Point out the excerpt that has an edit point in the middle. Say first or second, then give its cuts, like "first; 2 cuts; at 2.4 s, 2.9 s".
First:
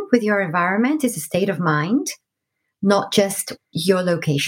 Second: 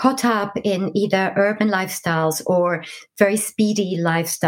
first; 1 cut; at 3.6 s